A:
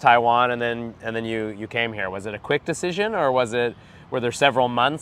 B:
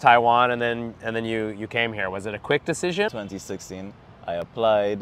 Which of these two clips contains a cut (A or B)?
B